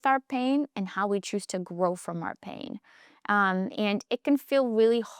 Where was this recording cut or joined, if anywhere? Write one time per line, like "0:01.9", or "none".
none